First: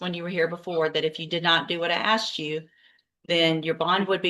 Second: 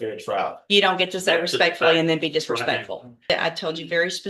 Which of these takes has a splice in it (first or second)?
second